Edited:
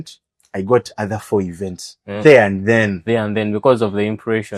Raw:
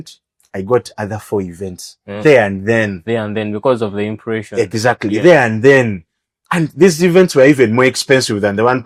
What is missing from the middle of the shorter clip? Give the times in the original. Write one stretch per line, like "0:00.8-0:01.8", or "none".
none